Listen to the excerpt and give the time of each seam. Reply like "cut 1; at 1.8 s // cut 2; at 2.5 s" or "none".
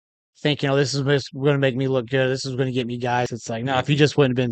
cut 1; at 3.4 s